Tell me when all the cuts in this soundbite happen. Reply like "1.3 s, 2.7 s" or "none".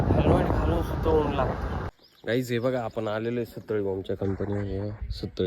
2.1 s

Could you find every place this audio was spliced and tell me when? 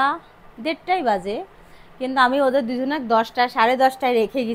none

